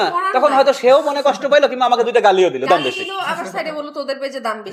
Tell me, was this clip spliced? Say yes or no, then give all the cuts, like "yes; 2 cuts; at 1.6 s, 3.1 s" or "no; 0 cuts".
no; 0 cuts